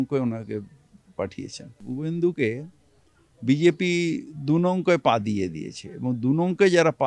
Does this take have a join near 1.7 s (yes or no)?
yes